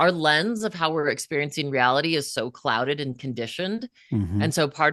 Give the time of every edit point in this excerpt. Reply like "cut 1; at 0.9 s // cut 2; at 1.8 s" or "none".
none